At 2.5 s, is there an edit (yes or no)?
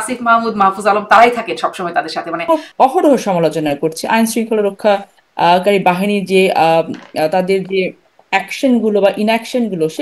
yes